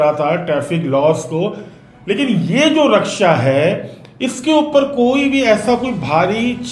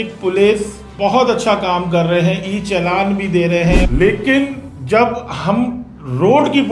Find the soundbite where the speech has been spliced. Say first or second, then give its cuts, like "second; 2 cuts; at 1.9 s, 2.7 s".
second; 1 cut; at 3.8 s